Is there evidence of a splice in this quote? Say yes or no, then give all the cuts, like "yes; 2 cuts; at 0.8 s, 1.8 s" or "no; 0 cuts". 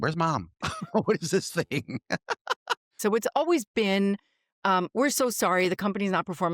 yes; 1 cut; at 2.9 s